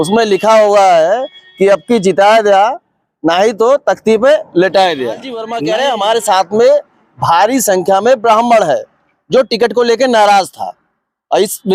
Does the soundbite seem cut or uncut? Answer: cut